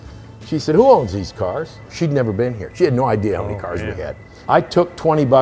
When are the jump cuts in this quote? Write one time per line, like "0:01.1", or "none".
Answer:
0:01.9
0:04.3